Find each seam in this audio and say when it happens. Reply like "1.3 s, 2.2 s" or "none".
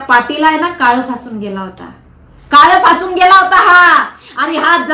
none